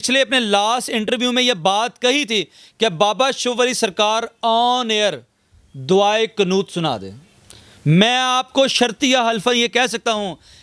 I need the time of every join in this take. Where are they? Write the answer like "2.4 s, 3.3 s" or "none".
none